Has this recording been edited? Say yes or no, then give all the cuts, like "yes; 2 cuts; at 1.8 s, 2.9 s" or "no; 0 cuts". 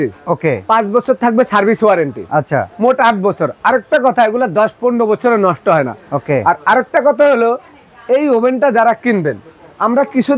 no; 0 cuts